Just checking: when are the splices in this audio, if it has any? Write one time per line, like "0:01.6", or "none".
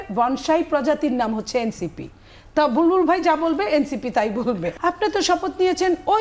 0:04.7